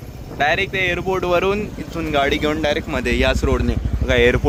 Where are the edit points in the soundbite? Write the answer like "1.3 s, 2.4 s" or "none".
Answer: none